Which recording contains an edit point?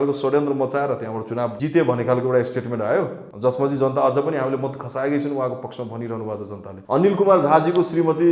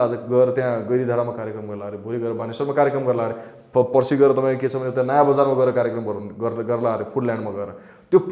first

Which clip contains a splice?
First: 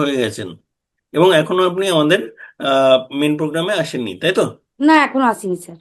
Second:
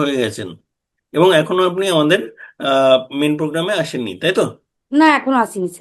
first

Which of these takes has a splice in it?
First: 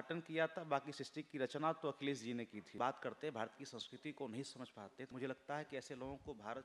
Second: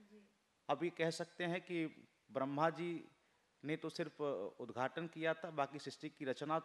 first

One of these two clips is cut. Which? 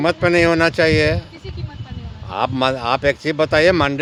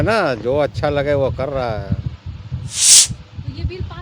second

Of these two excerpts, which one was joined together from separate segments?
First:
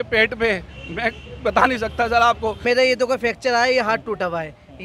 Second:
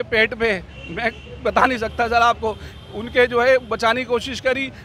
first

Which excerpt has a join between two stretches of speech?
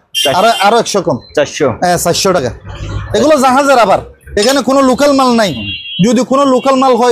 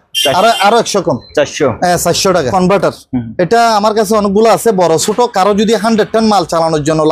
second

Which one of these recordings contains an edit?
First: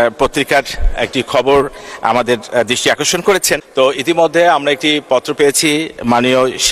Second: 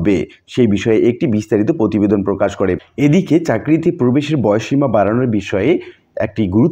second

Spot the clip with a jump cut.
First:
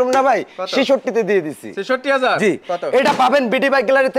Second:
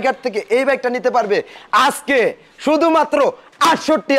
first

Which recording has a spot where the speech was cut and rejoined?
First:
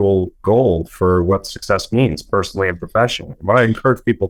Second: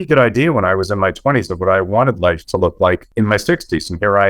second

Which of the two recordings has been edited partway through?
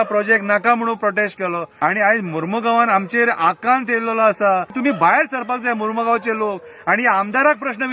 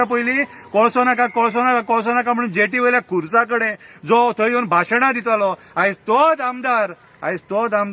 first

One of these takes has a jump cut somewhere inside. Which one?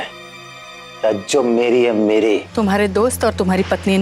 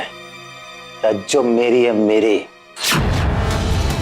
first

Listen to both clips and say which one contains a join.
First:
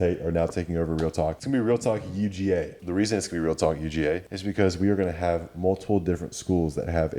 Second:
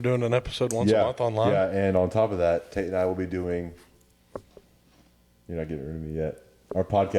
first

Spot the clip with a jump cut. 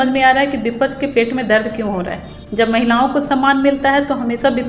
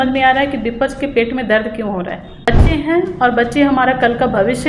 second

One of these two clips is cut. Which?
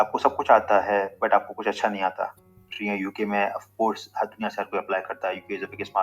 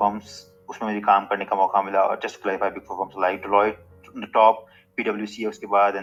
first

